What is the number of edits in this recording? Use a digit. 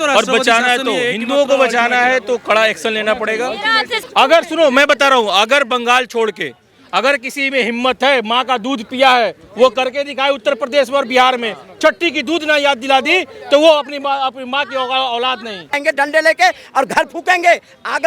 2